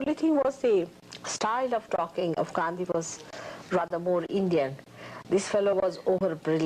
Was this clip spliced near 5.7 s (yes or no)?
yes